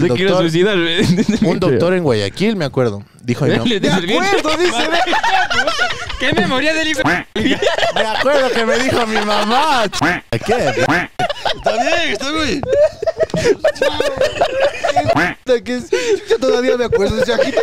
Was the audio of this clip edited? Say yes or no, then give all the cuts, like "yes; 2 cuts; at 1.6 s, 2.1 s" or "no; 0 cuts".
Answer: no; 0 cuts